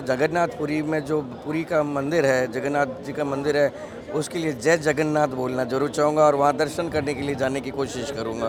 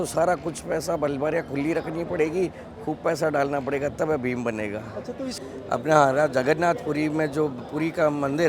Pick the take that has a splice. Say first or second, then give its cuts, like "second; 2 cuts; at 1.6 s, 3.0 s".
second; 1 cut; at 5.3 s